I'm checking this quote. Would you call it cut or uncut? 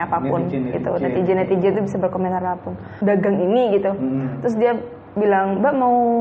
cut